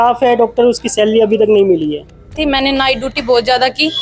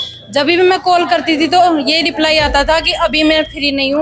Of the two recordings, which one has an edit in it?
first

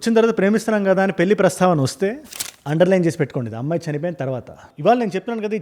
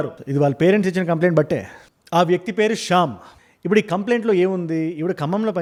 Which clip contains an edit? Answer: first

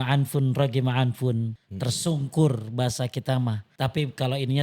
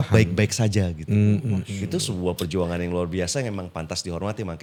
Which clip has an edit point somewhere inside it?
first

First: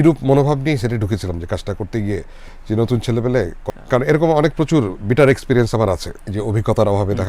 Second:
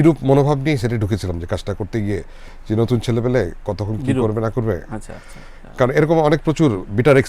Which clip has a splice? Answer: first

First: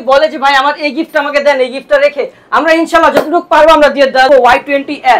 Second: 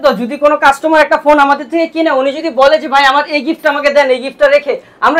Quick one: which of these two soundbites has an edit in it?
first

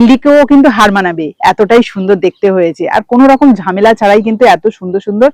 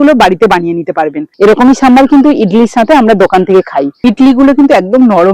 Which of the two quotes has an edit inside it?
second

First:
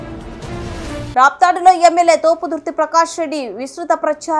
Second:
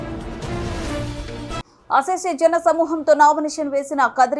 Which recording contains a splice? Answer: second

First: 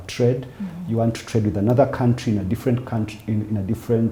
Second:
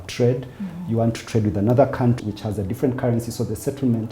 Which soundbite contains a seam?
second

